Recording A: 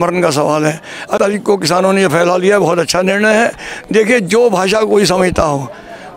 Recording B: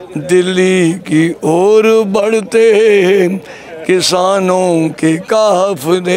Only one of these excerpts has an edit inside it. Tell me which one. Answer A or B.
A